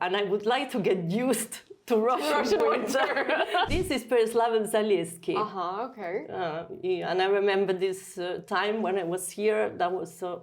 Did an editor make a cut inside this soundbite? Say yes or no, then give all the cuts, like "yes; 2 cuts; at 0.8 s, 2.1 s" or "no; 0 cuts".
yes; 1 cut; at 3.7 s